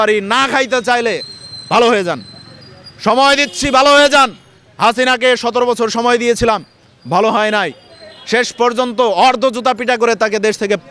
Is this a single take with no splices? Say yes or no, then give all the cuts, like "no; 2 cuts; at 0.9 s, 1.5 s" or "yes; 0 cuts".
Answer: yes; 0 cuts